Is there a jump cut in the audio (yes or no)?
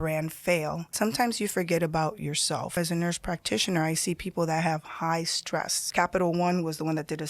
yes